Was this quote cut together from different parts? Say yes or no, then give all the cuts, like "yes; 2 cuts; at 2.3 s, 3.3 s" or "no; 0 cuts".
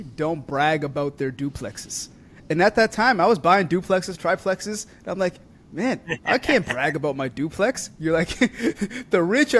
no; 0 cuts